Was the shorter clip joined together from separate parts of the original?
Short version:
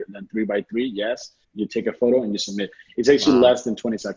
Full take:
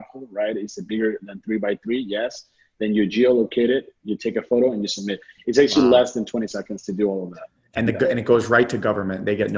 yes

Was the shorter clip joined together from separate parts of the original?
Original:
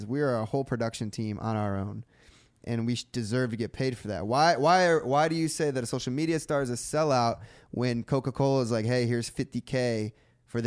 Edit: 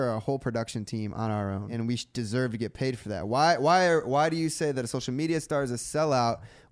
yes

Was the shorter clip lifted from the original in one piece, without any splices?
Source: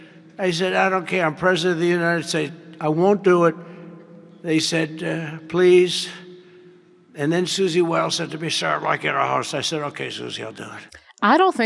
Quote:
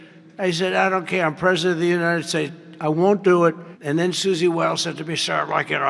no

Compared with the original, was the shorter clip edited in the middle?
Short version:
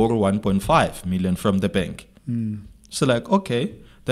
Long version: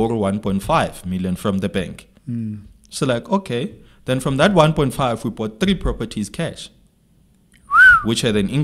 no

